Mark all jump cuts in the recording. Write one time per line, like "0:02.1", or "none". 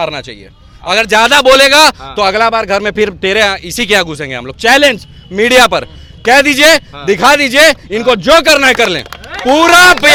none